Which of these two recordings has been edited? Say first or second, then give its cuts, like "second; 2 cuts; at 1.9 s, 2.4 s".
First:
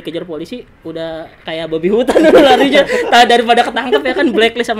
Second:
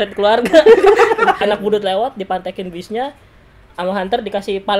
second; 1 cut; at 1.4 s